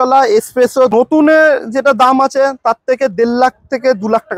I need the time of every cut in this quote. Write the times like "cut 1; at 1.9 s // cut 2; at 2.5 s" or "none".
cut 1; at 0.9 s